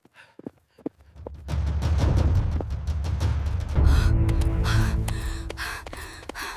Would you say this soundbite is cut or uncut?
uncut